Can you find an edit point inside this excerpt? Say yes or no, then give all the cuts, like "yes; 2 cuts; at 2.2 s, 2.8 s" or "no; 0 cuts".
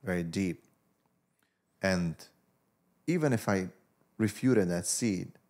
no; 0 cuts